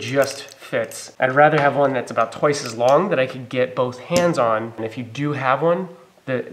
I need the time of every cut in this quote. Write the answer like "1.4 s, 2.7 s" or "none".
1.0 s, 4.9 s